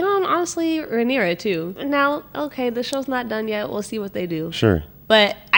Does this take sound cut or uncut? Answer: uncut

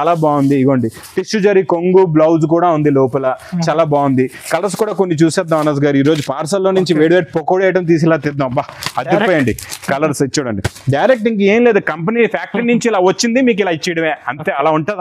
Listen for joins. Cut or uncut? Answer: uncut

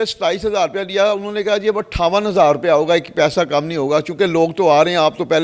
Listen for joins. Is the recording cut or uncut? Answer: uncut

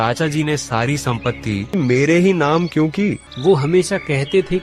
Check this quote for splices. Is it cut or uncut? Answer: cut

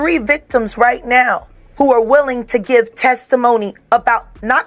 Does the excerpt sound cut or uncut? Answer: cut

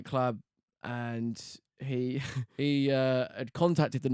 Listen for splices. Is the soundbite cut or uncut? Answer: cut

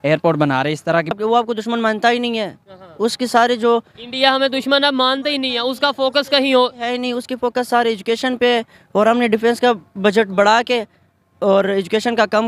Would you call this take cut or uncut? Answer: cut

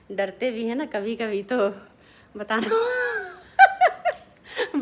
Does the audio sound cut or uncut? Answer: uncut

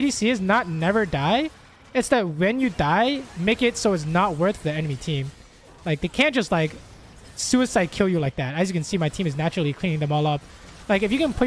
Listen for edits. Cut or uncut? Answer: uncut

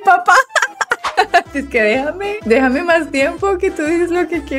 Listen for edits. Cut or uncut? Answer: cut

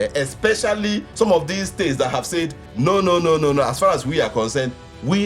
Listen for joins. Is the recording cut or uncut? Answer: cut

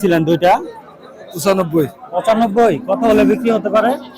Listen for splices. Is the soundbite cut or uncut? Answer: uncut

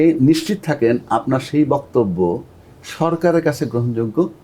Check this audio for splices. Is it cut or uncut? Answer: uncut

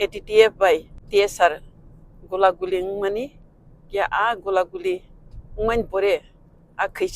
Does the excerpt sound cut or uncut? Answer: cut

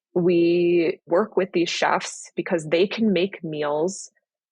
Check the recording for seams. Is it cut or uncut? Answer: cut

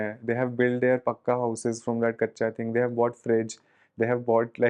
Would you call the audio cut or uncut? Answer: uncut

